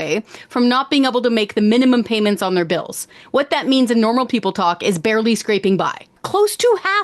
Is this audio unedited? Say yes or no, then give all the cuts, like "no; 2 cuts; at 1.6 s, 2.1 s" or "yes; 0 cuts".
no; 1 cut; at 6.1 s